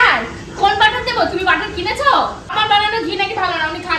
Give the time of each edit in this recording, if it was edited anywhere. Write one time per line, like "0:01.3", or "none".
0:02.5